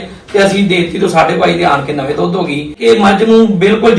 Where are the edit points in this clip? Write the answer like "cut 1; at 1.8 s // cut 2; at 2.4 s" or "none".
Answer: cut 1; at 2.8 s